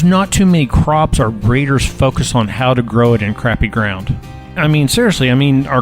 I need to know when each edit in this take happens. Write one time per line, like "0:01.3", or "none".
0:04.5